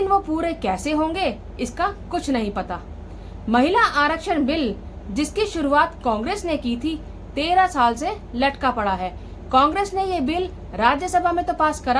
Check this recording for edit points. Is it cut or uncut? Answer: uncut